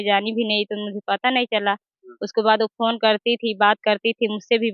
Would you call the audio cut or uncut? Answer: uncut